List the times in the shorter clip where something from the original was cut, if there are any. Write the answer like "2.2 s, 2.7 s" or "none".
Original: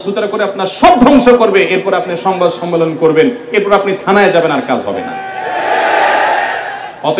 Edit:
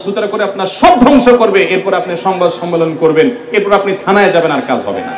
none